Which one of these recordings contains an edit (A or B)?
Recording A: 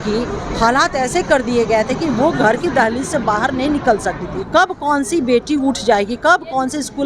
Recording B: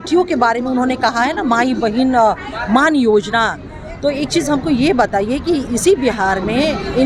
A